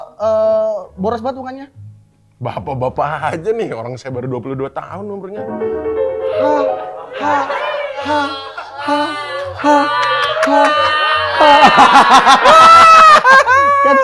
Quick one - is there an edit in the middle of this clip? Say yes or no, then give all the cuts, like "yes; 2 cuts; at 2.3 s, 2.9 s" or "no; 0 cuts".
no; 0 cuts